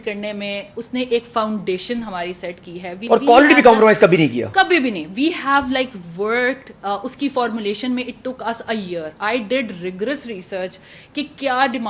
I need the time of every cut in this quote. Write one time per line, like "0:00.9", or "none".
0:03.1

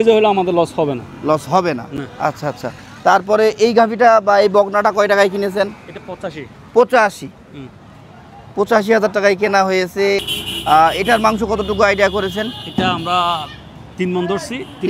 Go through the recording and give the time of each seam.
none

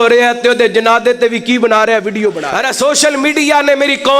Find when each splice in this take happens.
0:02.5

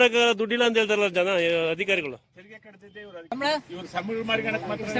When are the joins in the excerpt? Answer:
0:03.3

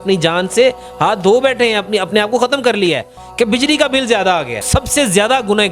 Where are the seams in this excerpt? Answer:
0:04.7

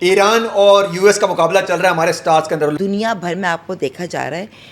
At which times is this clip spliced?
0:02.7

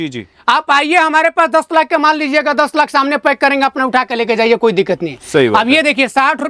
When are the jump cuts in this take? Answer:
none

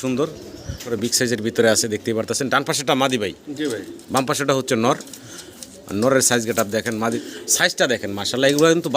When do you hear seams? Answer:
0:00.9
0:07.2

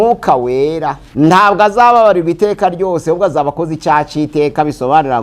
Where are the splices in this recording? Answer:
0:01.0

